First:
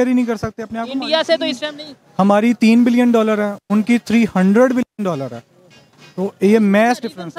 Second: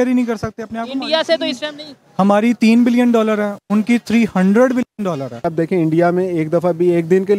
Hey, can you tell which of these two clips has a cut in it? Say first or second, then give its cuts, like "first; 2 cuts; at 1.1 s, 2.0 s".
second; 1 cut; at 5.4 s